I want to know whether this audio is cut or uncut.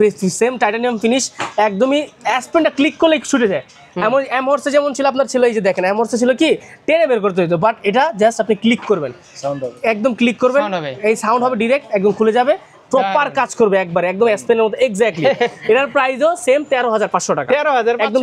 uncut